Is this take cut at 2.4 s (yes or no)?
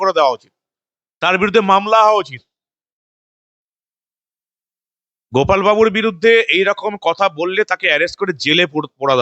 no